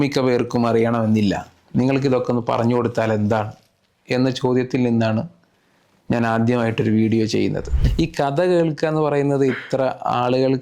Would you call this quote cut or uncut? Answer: cut